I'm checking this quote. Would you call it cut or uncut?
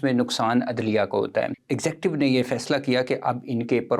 cut